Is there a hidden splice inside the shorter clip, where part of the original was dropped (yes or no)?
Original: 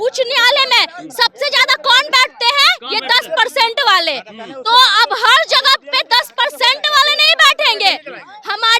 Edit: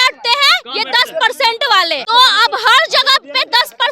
yes